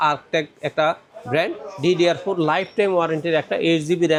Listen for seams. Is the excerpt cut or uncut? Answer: uncut